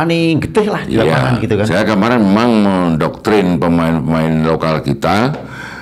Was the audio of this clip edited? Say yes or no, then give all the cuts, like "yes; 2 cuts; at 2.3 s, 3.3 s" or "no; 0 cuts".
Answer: no; 0 cuts